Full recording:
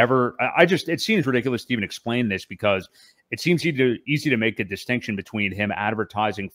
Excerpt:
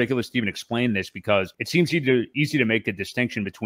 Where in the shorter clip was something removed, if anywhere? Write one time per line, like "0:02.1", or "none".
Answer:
0:01.6